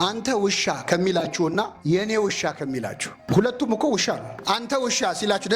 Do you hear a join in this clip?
yes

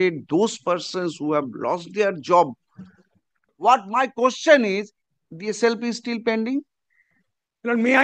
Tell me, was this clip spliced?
yes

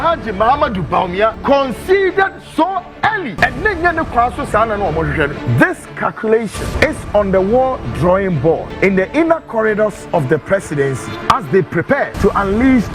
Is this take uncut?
no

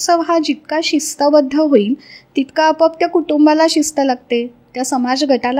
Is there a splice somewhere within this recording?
no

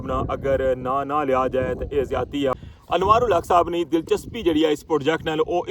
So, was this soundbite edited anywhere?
yes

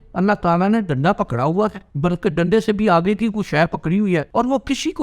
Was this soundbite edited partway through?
yes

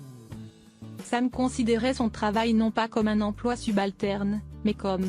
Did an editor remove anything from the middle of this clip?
yes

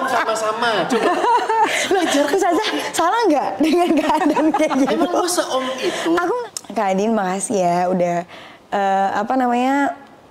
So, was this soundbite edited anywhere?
yes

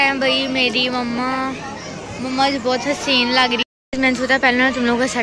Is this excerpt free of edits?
no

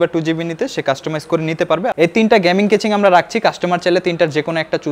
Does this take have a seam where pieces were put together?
yes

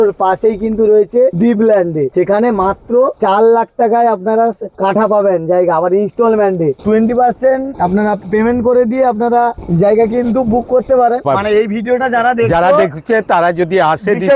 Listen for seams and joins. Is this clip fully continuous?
no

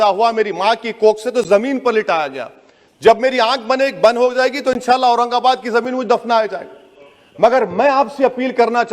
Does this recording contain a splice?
no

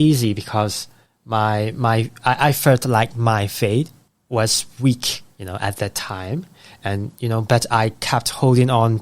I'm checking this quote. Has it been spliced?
no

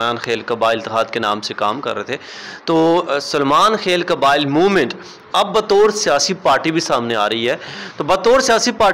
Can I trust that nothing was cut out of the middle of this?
yes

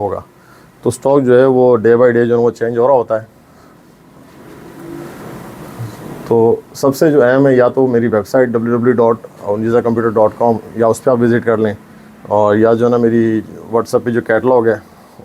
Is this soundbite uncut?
yes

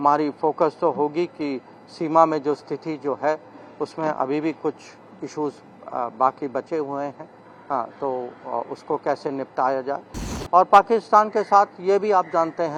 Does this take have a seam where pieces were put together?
no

